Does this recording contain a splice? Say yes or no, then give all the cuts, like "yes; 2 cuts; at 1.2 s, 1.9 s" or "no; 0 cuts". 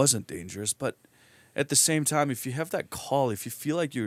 no; 0 cuts